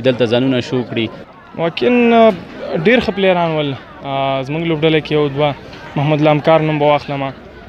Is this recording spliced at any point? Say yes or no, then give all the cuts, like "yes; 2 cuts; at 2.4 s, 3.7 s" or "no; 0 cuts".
yes; 1 cut; at 1.2 s